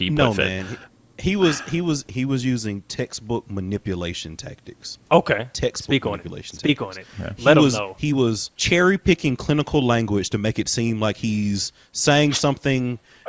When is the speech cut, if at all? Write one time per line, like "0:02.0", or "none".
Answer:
none